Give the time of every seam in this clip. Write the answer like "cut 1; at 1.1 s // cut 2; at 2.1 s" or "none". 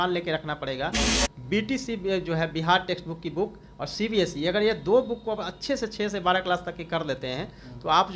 cut 1; at 1.1 s